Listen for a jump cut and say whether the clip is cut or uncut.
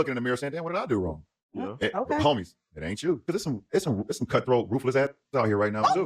cut